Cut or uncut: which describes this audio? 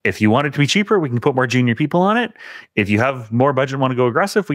uncut